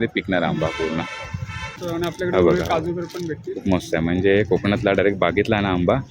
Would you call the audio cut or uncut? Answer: cut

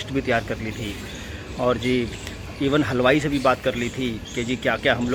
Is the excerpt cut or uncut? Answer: uncut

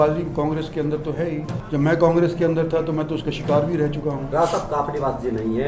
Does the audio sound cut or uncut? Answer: cut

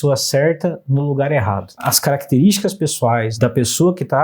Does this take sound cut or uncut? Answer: cut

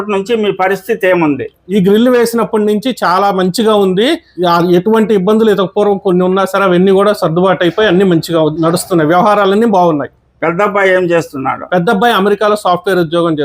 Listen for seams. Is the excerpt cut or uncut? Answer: cut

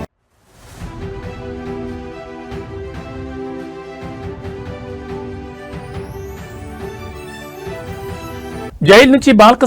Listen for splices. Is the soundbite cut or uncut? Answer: cut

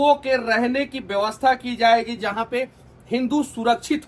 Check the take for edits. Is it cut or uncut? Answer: uncut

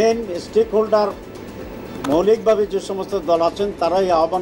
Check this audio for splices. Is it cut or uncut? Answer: uncut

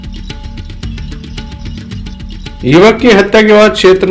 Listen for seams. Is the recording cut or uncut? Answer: cut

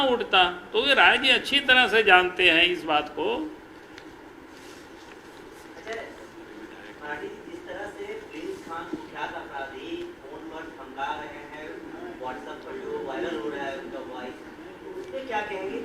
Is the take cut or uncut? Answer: uncut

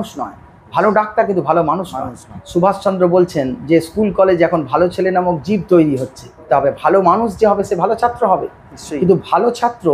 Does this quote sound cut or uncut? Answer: cut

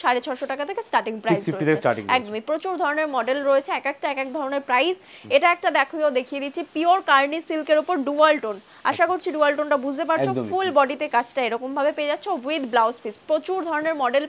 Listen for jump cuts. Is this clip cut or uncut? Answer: uncut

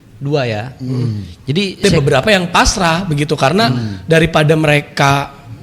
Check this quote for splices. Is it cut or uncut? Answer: cut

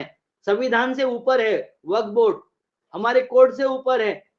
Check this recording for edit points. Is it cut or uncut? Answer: uncut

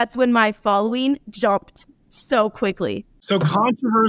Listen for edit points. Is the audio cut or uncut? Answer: cut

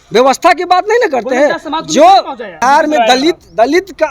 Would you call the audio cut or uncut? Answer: cut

